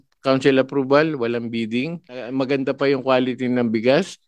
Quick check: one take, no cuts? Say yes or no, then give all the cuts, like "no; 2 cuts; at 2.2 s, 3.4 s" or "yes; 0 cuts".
no; 1 cut; at 2.3 s